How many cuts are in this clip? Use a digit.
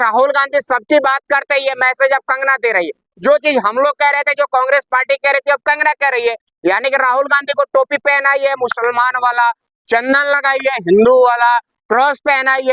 0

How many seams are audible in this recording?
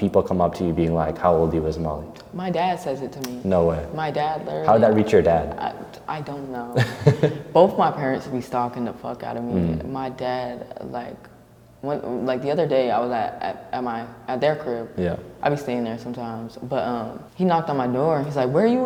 0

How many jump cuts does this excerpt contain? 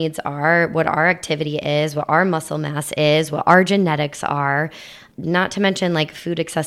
1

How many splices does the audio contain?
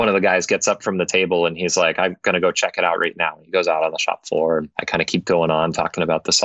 1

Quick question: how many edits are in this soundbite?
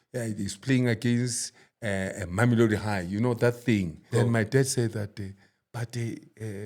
1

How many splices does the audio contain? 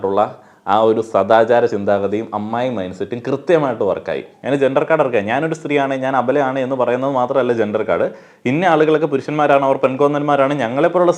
1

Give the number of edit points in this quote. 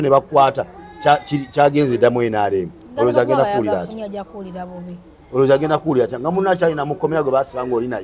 0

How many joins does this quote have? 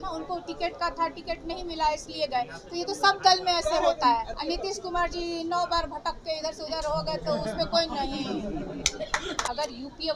2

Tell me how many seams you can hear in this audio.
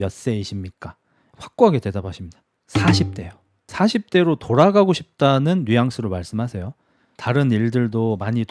3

